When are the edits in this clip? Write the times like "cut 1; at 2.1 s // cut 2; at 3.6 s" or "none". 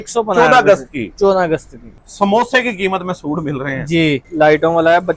cut 1; at 2.0 s // cut 2; at 4.2 s